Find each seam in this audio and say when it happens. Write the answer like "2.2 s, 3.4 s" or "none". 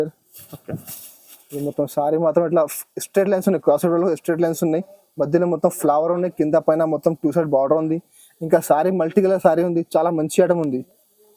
none